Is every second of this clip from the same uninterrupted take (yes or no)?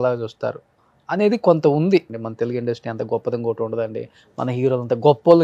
no